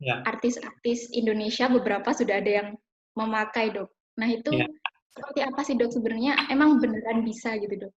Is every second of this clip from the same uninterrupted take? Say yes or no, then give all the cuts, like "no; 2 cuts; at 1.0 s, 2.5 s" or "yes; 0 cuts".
yes; 0 cuts